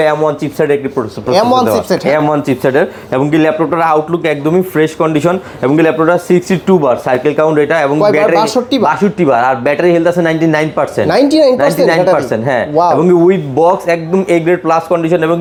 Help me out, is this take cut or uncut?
uncut